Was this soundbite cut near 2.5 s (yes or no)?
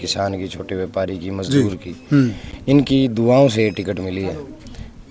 no